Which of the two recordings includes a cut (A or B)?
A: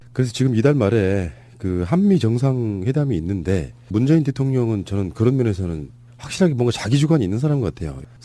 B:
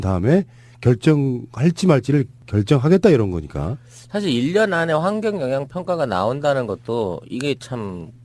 B